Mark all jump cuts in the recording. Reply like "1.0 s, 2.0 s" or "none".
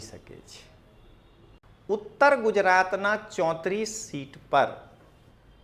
1.6 s